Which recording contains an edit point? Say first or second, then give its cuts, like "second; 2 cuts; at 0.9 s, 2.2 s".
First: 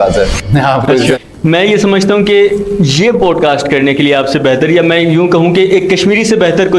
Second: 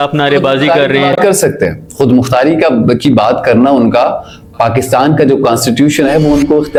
first; 1 cut; at 1.2 s